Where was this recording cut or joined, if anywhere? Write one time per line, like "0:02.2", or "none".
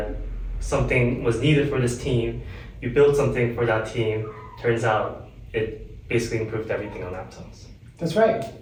none